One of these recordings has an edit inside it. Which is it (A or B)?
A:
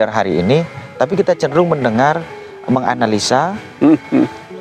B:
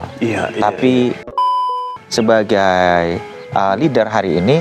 B